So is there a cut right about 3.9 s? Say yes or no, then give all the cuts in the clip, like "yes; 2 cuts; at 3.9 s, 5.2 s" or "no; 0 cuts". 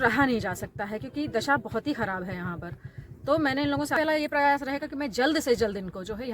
yes; 1 cut; at 3.9 s